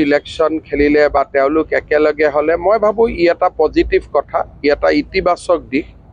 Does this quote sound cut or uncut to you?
uncut